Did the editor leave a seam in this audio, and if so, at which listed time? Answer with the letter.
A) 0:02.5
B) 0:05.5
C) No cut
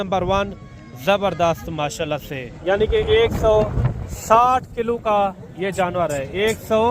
A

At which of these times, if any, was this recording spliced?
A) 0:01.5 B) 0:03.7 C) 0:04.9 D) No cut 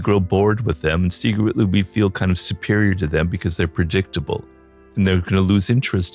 C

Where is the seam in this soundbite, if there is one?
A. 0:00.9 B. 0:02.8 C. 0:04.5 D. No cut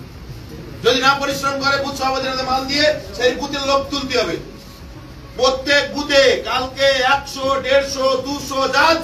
D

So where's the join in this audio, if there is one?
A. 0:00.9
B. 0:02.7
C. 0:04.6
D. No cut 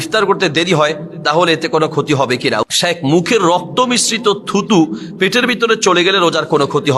B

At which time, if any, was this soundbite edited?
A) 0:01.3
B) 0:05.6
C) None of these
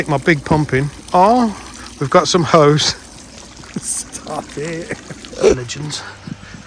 B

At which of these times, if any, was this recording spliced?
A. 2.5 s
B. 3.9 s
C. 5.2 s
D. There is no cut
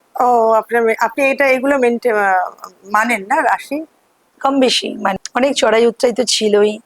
C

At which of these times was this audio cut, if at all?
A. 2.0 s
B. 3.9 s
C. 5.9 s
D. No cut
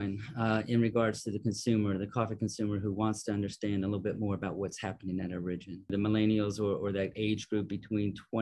C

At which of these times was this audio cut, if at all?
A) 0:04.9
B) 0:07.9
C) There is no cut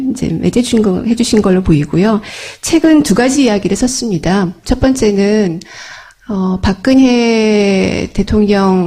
C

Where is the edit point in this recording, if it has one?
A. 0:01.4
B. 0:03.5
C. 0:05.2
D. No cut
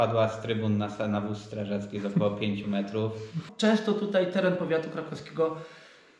B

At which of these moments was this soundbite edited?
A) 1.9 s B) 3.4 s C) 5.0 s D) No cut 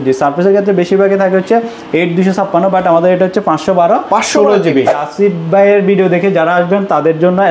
C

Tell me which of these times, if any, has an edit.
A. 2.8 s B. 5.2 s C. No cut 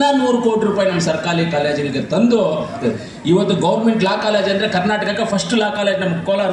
A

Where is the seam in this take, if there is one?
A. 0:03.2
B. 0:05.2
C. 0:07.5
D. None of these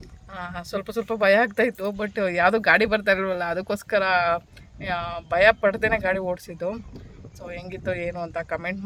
D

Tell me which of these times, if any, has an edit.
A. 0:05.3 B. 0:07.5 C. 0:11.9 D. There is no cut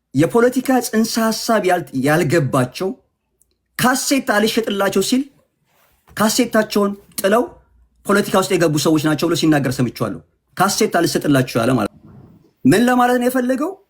C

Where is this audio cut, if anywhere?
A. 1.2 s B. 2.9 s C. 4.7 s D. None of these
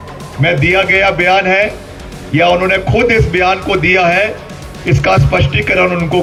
D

